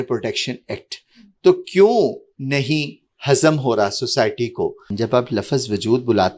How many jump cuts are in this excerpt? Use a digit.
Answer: 1